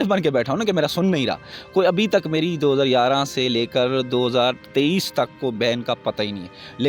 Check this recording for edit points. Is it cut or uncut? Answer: uncut